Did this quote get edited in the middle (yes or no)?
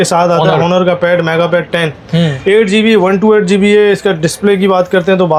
no